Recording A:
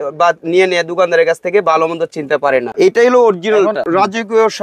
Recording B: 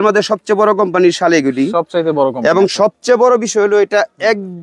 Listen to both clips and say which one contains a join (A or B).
A